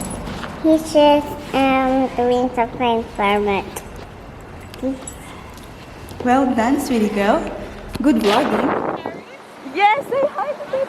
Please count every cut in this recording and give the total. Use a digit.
1